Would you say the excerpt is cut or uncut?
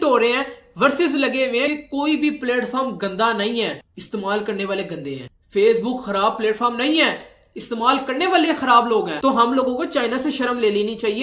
cut